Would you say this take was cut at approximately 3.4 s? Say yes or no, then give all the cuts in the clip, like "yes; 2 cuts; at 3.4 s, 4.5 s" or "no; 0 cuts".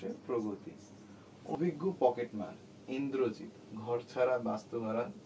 no; 1 cut; at 1.5 s